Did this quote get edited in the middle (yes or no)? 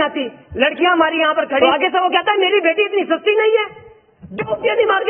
yes